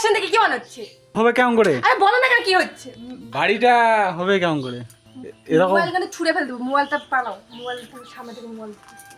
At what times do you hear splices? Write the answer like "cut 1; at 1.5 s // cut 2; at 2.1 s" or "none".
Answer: cut 1; at 1.1 s